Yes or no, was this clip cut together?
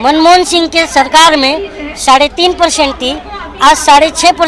no